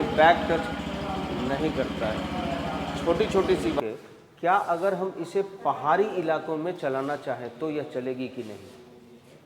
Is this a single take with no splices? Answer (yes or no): no